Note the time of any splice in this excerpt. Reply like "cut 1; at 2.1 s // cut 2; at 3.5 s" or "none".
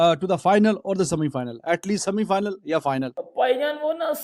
cut 1; at 3.2 s